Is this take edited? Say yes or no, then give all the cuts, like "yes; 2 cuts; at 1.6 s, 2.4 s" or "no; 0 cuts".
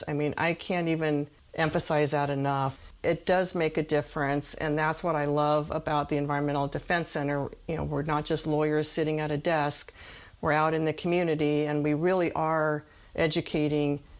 yes; 1 cut; at 2.7 s